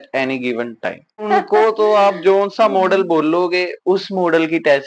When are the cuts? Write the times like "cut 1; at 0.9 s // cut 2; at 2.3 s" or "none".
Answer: cut 1; at 1.2 s